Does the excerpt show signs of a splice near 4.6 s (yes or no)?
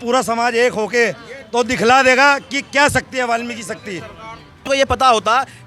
yes